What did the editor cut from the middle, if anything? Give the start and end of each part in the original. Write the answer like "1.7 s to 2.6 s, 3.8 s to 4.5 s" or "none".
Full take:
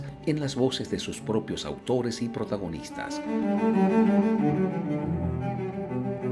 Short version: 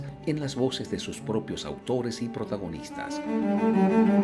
none